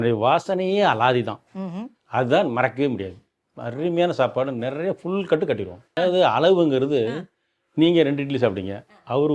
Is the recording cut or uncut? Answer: cut